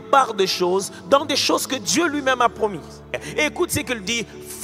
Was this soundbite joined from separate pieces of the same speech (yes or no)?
yes